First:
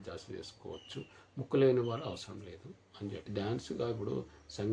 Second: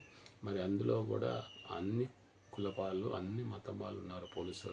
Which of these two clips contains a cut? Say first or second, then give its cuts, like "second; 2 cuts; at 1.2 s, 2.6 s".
first; 1 cut; at 3.2 s